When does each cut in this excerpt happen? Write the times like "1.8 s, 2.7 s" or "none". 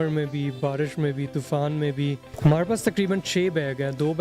2.3 s